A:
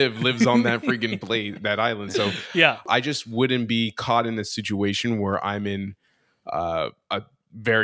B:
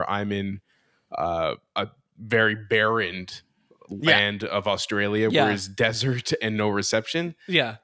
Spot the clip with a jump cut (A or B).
A